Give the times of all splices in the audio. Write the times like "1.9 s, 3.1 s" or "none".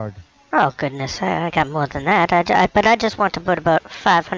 none